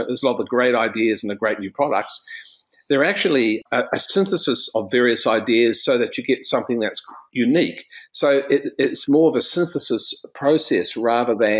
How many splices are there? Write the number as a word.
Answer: one